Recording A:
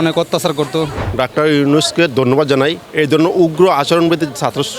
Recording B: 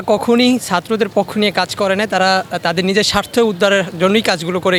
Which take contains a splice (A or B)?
A